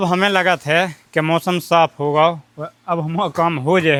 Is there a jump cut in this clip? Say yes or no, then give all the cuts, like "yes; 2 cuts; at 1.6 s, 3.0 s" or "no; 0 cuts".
no; 0 cuts